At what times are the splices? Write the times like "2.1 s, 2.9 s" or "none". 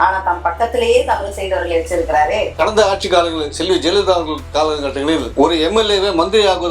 2.5 s